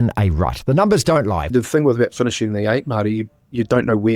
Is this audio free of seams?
no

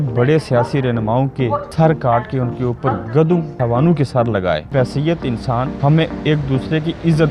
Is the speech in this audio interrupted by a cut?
yes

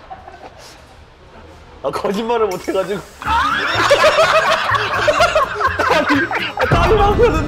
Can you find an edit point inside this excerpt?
no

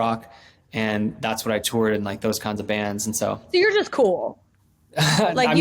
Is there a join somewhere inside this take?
yes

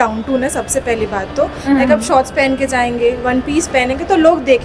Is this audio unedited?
yes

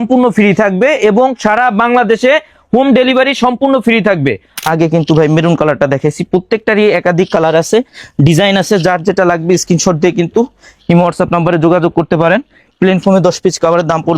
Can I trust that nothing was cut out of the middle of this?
no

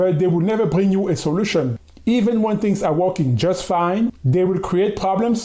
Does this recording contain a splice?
yes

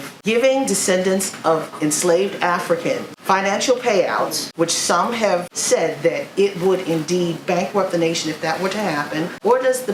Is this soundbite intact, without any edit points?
yes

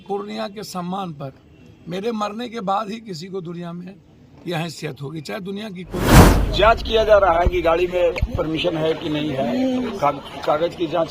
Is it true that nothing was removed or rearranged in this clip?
no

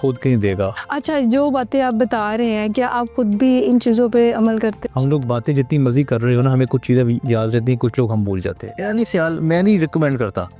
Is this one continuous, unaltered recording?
no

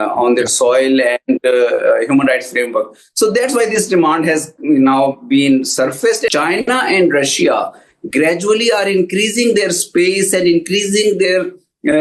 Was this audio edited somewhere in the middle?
yes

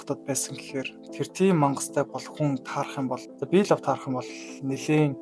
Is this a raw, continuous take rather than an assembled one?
no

